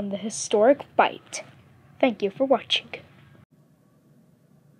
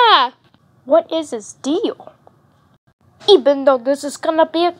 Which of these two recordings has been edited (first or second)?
first